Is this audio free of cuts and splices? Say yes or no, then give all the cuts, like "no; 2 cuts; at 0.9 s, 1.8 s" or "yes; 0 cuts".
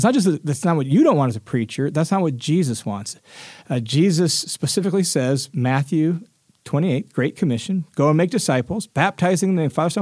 yes; 0 cuts